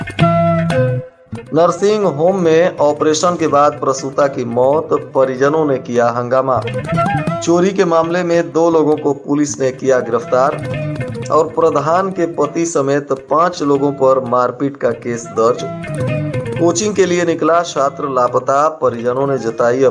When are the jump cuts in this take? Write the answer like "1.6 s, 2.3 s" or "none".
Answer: 1.1 s